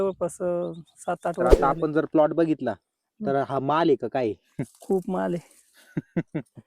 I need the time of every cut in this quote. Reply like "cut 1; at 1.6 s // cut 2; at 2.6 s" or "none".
cut 1; at 1.5 s